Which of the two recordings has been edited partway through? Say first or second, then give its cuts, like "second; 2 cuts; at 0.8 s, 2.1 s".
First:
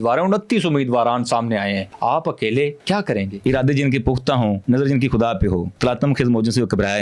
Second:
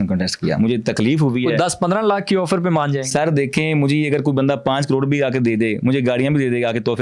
first; 4 cuts; at 1.9 s, 3.1 s, 4.6 s, 5.7 s